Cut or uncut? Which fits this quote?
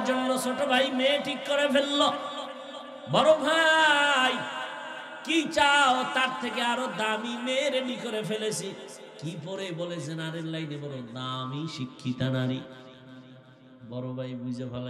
uncut